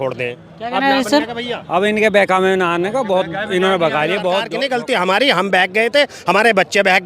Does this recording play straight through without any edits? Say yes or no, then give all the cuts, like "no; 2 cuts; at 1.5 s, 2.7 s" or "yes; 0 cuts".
no; 1 cut; at 4.5 s